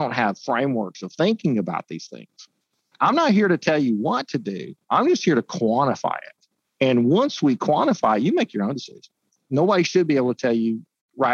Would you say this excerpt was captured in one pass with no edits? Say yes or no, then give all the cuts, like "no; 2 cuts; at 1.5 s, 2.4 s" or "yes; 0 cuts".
no; 2 cuts; at 3.0 s, 9.5 s